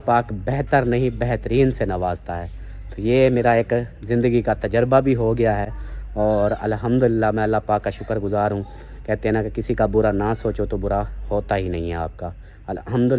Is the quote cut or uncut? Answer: uncut